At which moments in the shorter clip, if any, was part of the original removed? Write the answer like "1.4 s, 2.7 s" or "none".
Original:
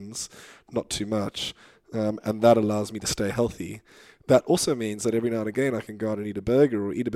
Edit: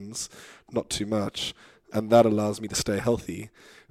1.9 s